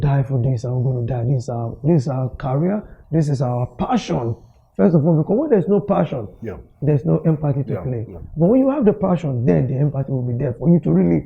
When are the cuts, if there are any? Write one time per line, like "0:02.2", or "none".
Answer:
none

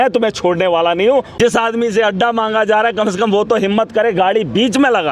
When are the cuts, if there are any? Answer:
0:01.3

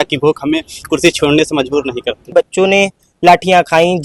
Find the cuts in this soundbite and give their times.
0:02.3

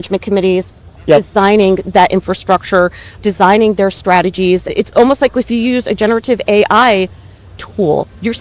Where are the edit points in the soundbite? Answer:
0:01.1
0:03.2
0:04.7

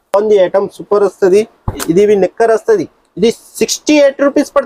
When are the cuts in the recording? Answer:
none

